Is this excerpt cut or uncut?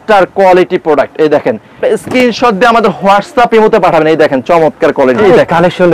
cut